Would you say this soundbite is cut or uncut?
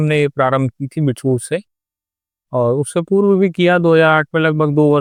uncut